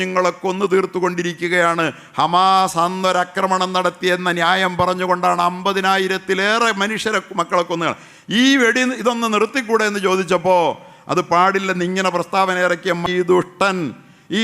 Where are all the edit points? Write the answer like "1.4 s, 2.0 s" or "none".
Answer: 13.0 s